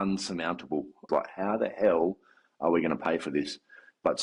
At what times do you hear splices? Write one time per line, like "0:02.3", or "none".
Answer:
0:01.0